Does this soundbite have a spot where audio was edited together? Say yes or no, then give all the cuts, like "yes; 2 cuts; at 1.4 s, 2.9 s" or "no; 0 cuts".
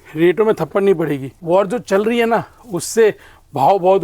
yes; 1 cut; at 1.3 s